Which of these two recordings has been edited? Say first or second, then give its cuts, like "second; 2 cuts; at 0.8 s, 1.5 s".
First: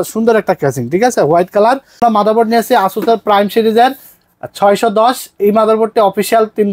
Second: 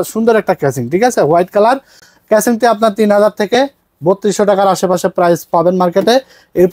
first; 1 cut; at 2.0 s